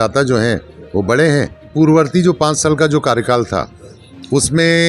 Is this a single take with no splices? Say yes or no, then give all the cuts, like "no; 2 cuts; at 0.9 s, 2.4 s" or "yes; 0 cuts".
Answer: no; 1 cut; at 1.7 s